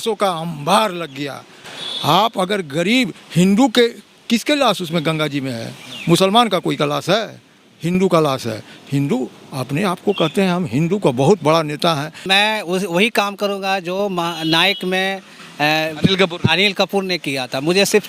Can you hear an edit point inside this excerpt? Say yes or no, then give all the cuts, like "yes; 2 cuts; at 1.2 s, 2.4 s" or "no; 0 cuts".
yes; 1 cut; at 12.2 s